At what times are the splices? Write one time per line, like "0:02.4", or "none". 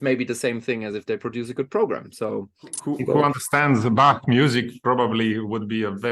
0:02.6